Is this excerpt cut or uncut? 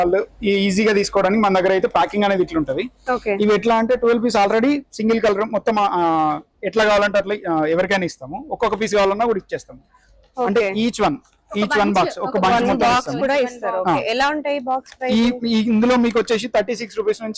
uncut